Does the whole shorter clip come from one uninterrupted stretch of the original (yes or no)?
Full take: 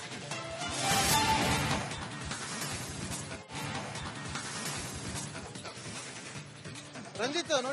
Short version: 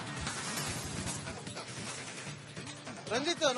no